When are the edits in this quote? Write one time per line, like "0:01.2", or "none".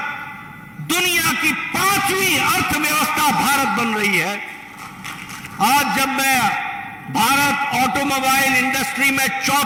none

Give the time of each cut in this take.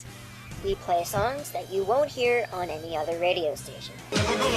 0:02.1

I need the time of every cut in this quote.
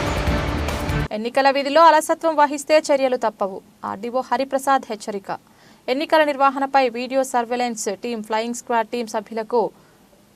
0:01.0

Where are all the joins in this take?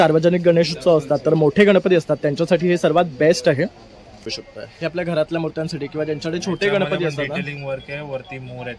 0:04.4

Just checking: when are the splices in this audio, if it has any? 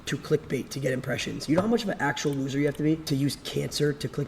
0:03.0

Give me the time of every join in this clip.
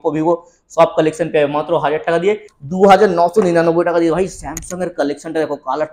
0:02.5

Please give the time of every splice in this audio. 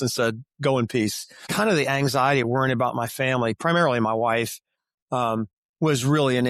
0:01.5

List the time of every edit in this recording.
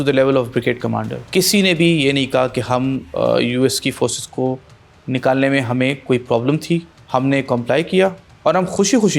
0:01.2
0:06.9

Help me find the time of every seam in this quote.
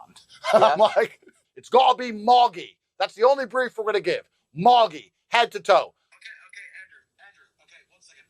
0:01.4

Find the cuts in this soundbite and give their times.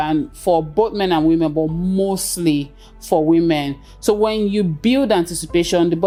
none

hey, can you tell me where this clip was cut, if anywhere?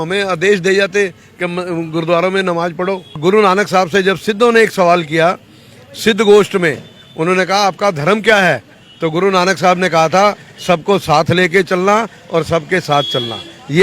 0:03.2

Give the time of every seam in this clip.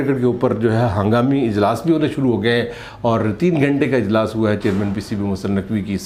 none

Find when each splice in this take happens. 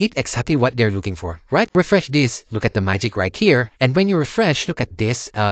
0:01.7

